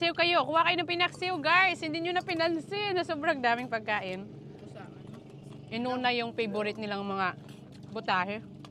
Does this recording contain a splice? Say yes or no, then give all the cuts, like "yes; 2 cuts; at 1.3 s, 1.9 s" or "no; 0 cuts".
no; 0 cuts